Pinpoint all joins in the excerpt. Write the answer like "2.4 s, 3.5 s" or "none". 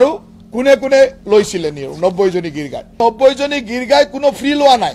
3.0 s

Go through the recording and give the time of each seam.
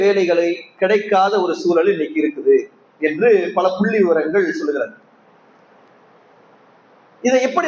none

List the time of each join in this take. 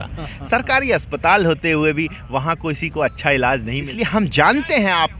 3.9 s

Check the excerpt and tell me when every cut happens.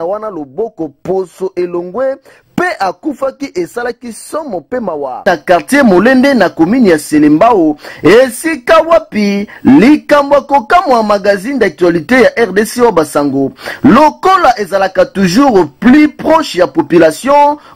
5.2 s

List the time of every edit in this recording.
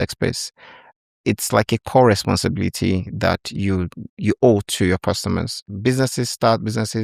5.7 s

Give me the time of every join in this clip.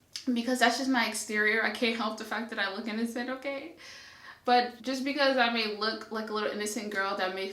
4.8 s

